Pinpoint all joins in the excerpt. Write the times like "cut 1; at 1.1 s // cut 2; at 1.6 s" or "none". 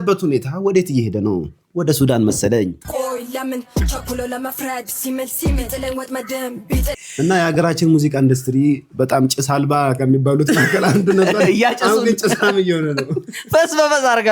cut 1; at 2.8 s // cut 2; at 7.0 s